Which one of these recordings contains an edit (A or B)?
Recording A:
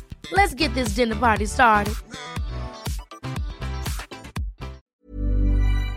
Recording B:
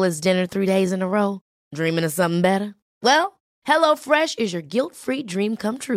A